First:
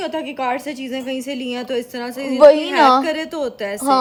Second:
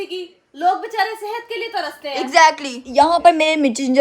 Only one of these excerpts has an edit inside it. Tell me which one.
second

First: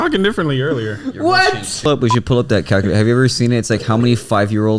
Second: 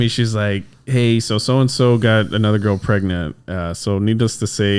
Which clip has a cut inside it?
first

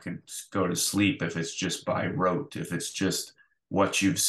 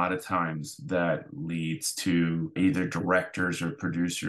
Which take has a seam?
second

